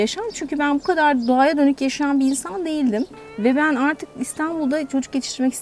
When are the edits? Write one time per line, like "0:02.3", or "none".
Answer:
0:03.1

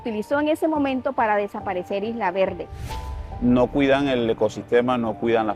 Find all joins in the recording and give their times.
0:02.9

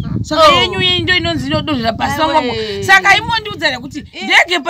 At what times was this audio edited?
none

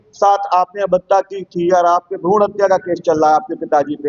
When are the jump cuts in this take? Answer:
none

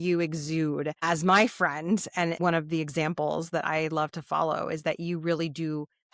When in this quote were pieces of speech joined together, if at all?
0:01.0
0:02.4

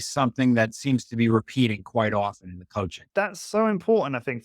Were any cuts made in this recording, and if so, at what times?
0:03.0

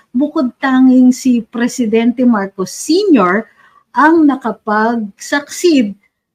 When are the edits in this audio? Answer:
none

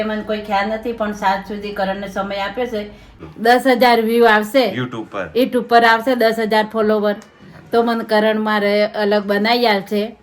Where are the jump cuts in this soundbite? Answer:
0:03.1

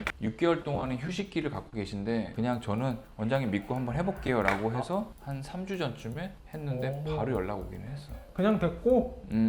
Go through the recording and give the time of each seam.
0:02.3

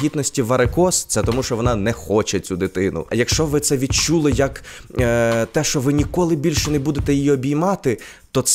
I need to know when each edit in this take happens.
0:03.1

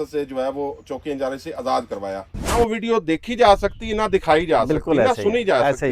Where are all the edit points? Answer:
0:02.5

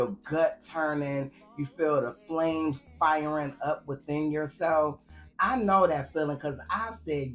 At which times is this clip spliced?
0:01.3

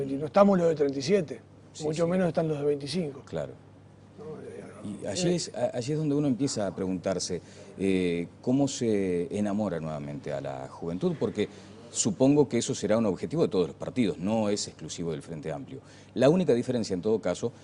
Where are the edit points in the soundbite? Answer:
0:11.9

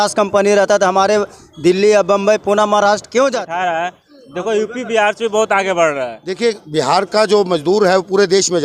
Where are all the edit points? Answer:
0:03.5
0:06.2

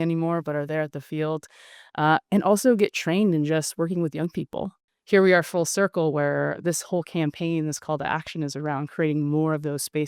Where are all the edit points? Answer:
0:04.8

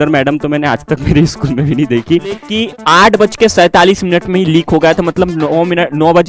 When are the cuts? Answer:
0:02.5

